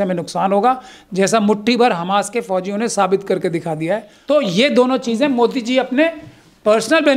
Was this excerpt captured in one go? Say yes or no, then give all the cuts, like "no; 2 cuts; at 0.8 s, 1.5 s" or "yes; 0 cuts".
no; 1 cut; at 4.1 s